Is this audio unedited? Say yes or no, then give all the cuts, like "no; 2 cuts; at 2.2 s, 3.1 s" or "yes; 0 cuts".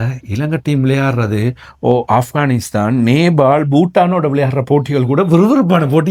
yes; 0 cuts